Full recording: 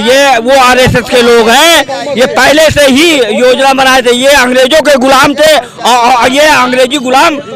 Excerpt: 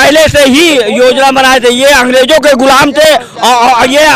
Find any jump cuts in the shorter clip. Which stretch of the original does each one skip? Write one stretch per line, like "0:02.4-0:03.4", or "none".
none